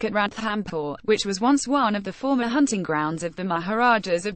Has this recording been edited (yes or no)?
no